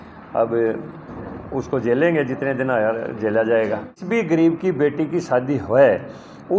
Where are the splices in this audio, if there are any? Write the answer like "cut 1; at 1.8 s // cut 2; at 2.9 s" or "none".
cut 1; at 4.0 s